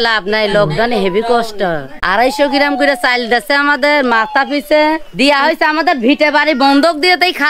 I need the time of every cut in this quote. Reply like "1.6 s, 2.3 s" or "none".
1.9 s, 5.1 s